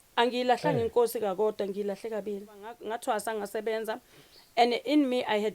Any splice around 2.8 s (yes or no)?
yes